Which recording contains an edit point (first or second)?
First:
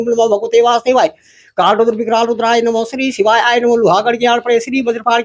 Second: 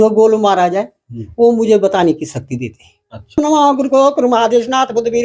second